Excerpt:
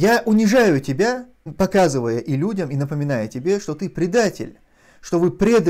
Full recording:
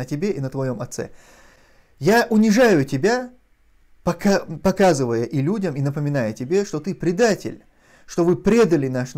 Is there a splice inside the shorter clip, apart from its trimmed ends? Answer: yes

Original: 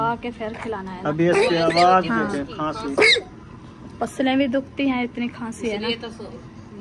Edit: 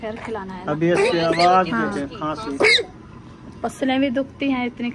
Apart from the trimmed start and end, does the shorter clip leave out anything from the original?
no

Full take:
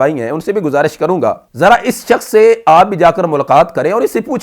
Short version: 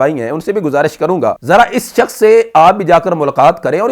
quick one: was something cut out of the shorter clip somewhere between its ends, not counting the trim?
yes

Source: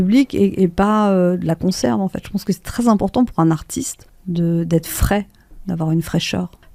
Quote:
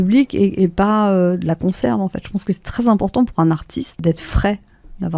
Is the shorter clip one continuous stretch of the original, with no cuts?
no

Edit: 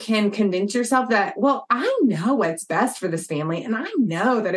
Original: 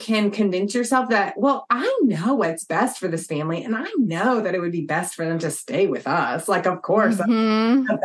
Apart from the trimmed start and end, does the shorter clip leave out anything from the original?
no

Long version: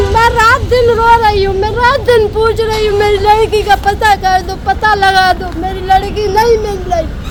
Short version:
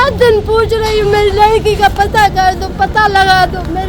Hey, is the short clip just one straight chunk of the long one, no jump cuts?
yes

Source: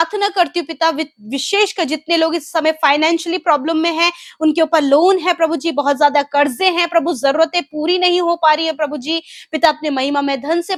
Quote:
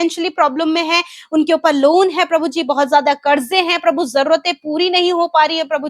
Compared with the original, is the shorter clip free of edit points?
yes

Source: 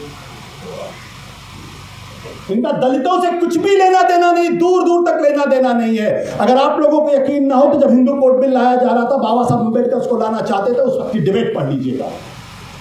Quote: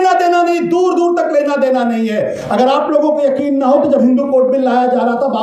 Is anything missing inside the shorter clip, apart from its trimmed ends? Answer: no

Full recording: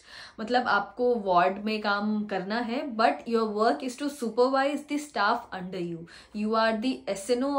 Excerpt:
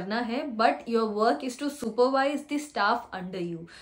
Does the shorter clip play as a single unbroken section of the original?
yes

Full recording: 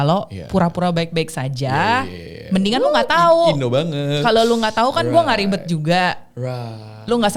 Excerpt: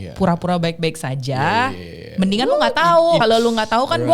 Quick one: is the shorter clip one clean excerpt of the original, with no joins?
no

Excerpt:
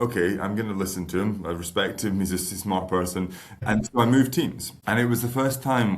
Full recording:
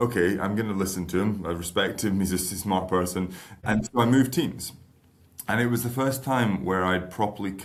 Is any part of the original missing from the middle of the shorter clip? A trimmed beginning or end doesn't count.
yes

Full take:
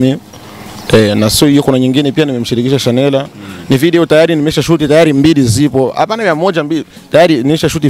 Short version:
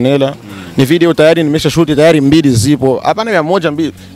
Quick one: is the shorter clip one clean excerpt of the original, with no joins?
yes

